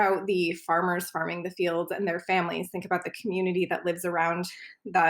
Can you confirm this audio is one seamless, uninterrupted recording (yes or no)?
yes